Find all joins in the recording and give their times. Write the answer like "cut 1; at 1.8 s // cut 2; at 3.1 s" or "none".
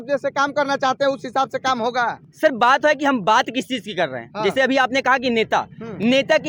none